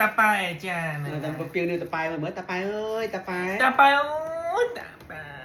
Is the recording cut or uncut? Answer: uncut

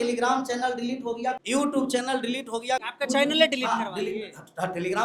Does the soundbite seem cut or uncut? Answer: cut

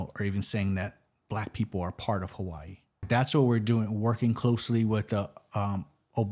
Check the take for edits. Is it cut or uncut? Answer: cut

